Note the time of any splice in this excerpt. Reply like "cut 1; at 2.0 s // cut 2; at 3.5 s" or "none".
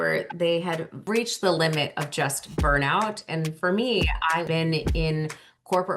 cut 1; at 1.0 s // cut 2; at 4.5 s